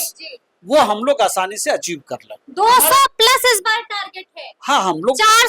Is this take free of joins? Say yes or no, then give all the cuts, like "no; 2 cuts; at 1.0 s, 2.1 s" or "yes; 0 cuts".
yes; 0 cuts